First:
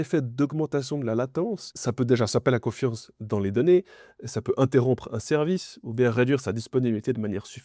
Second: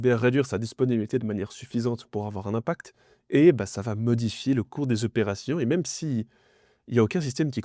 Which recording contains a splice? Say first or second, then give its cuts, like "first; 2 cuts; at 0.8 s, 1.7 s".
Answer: first; 1 cut; at 1.7 s